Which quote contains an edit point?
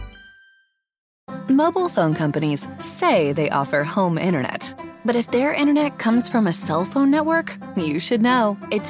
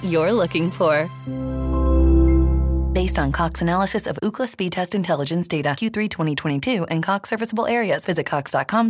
first; 1 cut; at 1.1 s

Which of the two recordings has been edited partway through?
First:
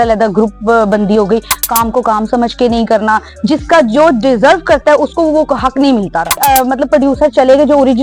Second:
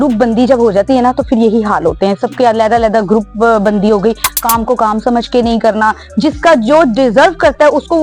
first; 1 cut; at 6.4 s

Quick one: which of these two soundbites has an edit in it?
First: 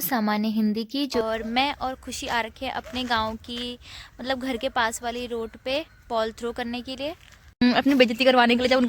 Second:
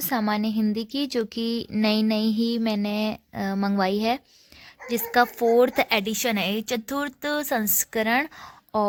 first; 2 cuts; at 1.2 s, 7.6 s

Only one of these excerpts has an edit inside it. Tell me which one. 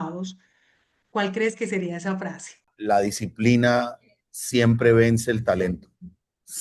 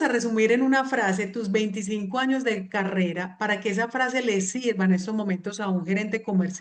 first; 1 cut; at 2.7 s

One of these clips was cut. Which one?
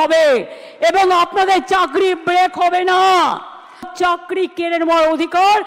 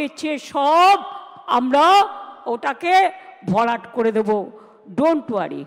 first; 1 cut; at 3.9 s

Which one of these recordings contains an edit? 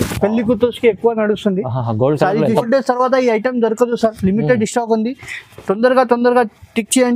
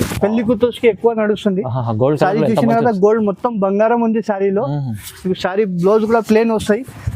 first; 1 cut; at 2.6 s

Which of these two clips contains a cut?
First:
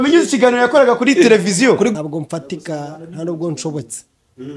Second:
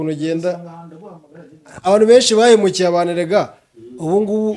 first; 1 cut; at 1.9 s

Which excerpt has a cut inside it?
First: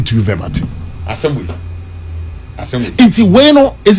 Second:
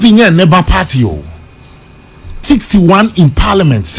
second; 1 cut; at 2.4 s

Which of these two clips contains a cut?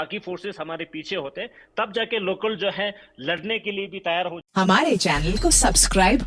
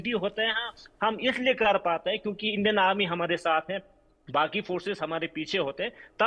first; 1 cut; at 4.5 s

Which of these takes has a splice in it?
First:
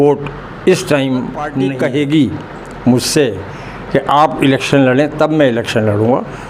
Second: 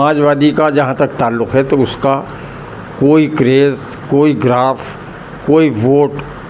first; 1 cut; at 1.5 s

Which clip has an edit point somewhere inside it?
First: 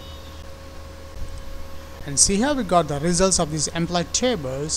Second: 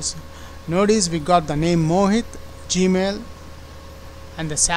first; 1 cut; at 2.0 s

